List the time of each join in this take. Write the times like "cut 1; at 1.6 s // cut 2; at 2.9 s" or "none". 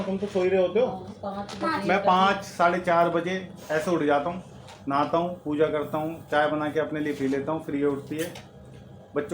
none